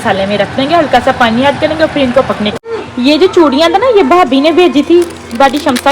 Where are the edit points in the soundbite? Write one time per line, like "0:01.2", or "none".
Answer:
0:02.5